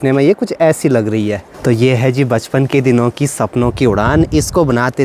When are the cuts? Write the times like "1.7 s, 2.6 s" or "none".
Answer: 1.5 s